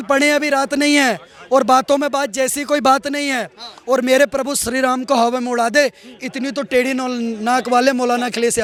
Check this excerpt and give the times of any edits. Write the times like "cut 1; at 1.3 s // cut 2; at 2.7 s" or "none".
none